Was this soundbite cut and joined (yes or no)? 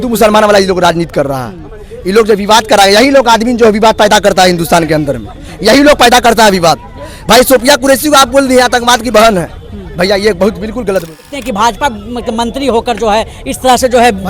yes